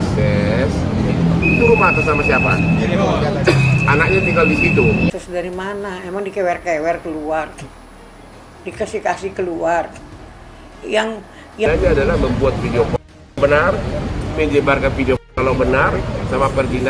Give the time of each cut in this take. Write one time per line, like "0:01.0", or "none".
0:05.1
0:11.7